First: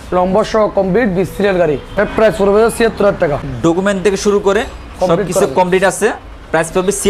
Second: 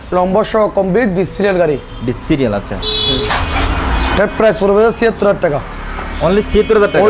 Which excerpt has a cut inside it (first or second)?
first